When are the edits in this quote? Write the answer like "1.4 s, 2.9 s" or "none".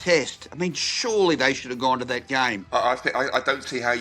2.6 s